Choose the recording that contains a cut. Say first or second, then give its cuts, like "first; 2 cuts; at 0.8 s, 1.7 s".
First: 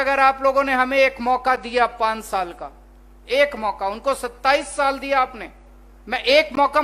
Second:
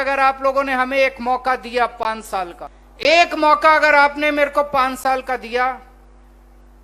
second; 1 cut; at 2.9 s